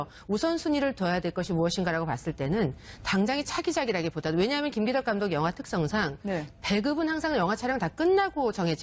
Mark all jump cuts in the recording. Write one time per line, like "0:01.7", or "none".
none

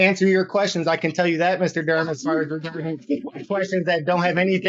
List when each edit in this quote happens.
none

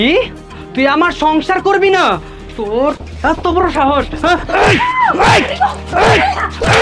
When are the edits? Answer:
none

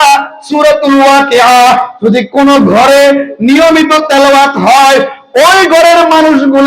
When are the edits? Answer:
none

